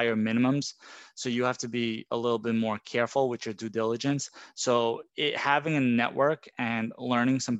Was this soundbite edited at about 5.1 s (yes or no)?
yes